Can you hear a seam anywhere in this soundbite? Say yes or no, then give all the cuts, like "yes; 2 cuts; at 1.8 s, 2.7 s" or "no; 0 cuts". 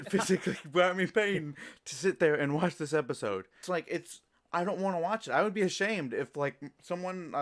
yes; 1 cut; at 3.6 s